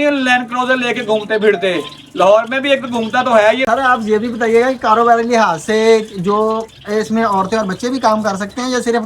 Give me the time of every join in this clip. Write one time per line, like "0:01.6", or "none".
0:03.6